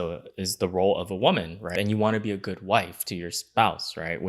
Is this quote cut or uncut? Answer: cut